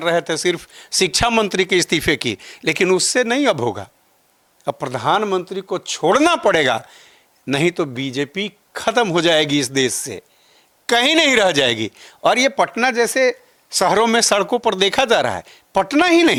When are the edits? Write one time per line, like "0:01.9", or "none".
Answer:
none